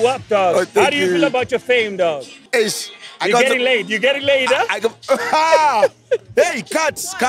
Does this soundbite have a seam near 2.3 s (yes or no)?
yes